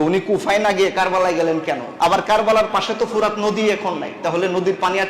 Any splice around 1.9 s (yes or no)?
yes